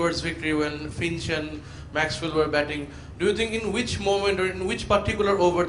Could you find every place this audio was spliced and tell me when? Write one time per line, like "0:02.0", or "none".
none